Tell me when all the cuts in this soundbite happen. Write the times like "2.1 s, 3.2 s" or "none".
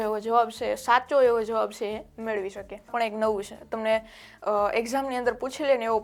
2.9 s